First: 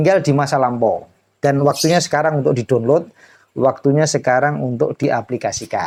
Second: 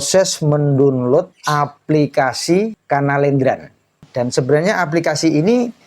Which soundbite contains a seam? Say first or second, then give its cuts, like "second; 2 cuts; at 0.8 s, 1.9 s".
second; 3 cuts; at 1.4 s, 2.8 s, 4.0 s